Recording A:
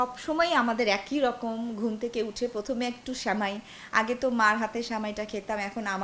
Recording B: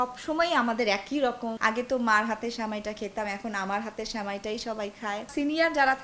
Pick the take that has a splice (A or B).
B